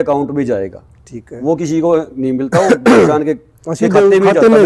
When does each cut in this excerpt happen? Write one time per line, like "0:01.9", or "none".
none